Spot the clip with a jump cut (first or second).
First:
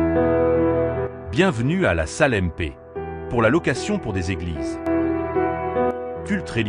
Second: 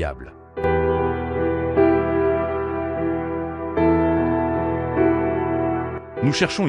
first